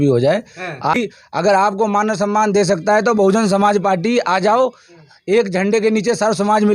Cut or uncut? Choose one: cut